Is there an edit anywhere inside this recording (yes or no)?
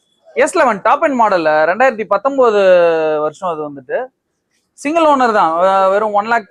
no